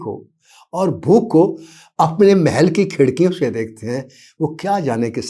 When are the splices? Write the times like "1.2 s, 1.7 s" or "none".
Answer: none